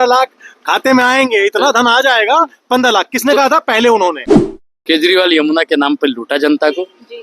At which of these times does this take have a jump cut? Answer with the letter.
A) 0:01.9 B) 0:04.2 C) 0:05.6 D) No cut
B